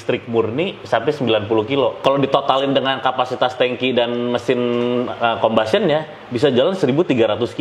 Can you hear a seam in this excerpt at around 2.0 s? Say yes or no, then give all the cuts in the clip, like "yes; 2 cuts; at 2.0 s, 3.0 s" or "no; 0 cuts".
yes; 1 cut; at 2.0 s